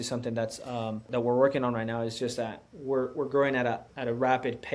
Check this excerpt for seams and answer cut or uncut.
cut